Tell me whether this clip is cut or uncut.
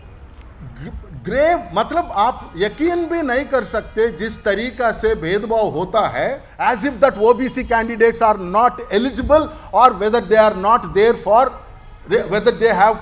cut